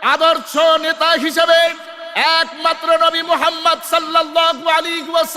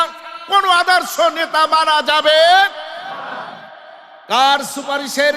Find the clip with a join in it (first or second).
second